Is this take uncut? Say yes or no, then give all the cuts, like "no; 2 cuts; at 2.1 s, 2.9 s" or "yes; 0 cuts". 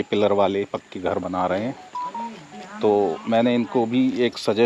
yes; 0 cuts